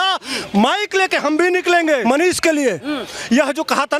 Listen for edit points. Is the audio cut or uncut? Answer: cut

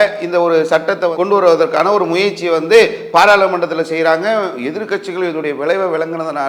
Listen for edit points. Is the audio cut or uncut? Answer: uncut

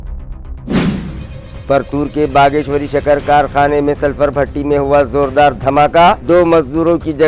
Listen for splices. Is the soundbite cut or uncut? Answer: cut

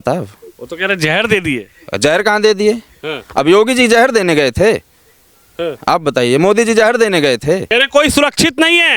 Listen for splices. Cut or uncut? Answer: cut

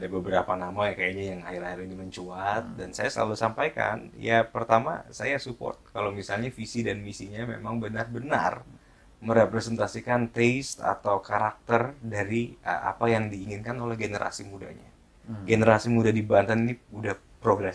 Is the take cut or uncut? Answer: uncut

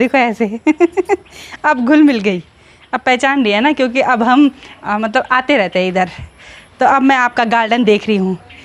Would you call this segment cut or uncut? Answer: uncut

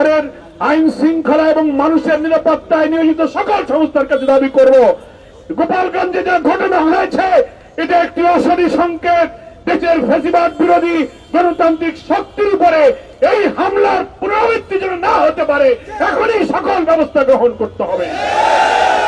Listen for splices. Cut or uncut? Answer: uncut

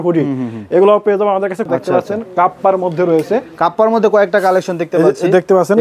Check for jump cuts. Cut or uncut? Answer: cut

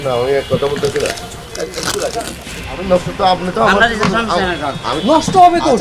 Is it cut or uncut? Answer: cut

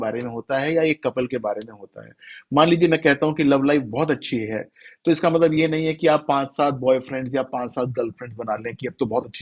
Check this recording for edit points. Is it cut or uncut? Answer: uncut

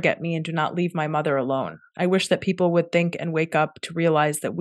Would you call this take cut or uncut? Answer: uncut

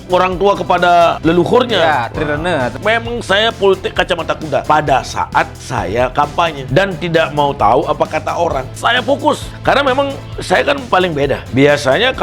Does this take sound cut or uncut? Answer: cut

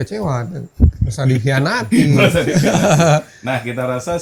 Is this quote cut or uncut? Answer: uncut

